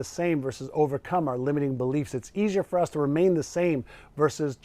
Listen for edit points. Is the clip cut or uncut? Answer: uncut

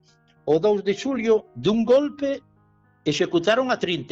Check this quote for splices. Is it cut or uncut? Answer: uncut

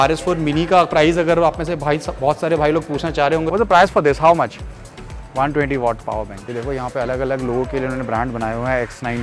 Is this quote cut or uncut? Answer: cut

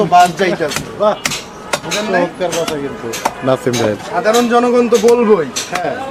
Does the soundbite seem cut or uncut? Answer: uncut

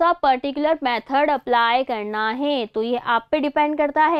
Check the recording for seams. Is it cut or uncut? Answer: uncut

